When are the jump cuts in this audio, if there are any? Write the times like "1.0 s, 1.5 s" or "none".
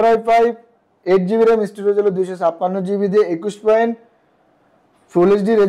none